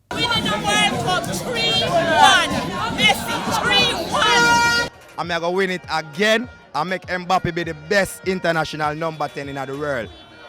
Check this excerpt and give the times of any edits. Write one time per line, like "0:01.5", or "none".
0:05.0